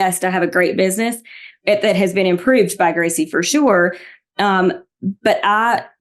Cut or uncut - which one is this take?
uncut